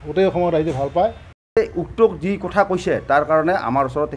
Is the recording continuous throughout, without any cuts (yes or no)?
no